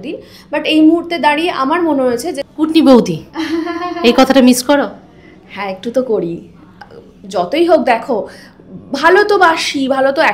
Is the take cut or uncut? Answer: cut